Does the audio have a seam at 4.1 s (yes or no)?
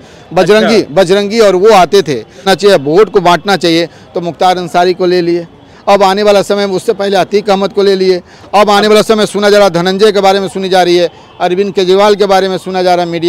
no